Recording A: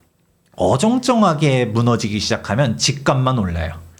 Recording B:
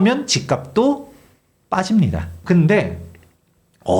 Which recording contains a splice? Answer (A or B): B